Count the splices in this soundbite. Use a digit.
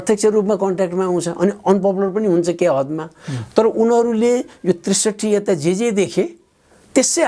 0